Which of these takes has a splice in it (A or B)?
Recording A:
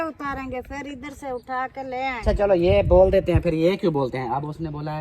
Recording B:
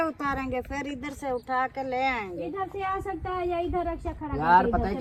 A